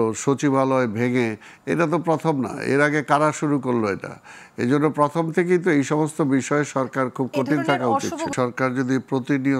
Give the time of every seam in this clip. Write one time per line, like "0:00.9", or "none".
0:08.3